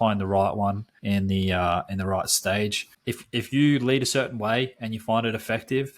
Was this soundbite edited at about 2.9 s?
yes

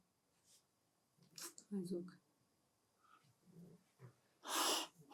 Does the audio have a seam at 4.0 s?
no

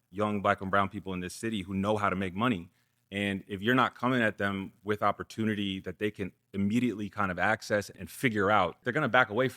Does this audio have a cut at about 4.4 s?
no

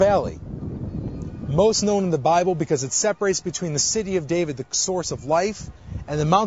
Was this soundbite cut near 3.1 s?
no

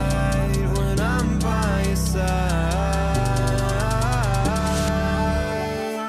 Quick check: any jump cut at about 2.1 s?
no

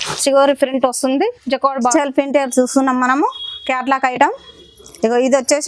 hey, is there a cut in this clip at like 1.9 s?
yes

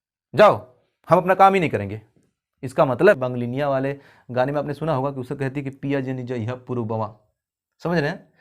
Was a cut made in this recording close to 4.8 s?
no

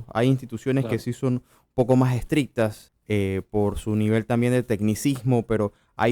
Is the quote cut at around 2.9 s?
yes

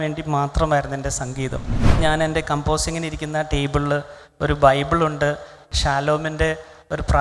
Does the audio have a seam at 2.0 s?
yes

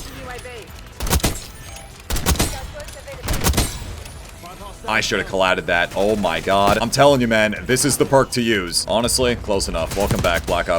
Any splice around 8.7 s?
yes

